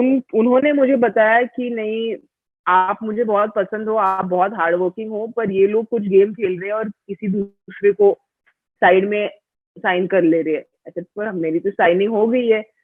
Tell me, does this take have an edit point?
no; 0 cuts

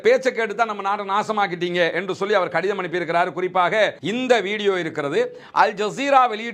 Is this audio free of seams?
no; 1 cut; at 4.0 s

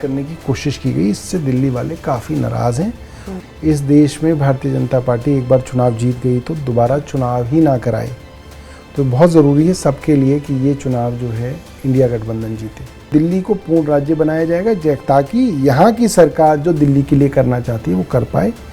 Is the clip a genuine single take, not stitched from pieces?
no; 2 cuts; at 3.3 s, 13.1 s

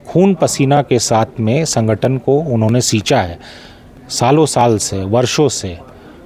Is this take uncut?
yes; 0 cuts

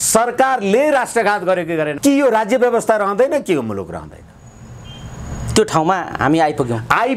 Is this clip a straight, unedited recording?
no; 1 cut; at 1.9 s

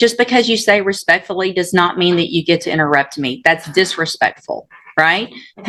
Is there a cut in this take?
no; 0 cuts

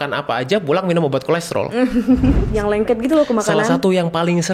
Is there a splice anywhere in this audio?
yes; 1 cut; at 2.5 s

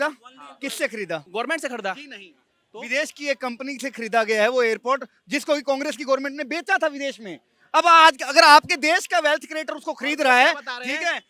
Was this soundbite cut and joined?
no; 0 cuts

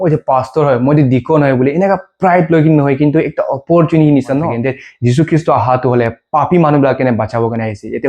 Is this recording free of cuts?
no; 1 cut; at 4.5 s

